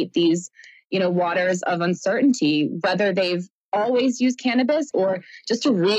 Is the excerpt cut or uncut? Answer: cut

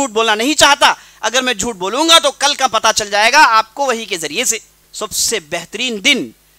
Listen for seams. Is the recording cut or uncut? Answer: cut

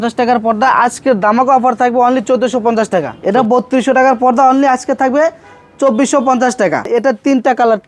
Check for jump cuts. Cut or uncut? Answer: cut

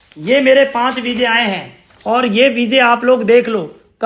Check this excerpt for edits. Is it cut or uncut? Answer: uncut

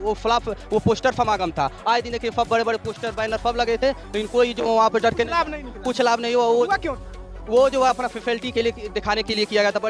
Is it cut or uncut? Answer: uncut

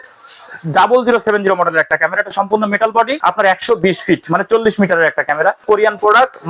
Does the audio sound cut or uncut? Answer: cut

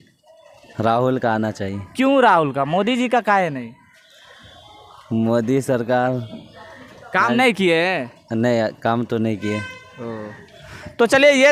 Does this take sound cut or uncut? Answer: uncut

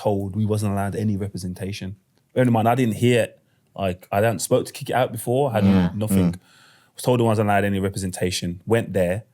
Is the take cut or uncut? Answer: uncut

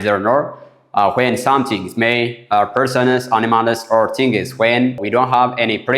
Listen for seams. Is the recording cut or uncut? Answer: cut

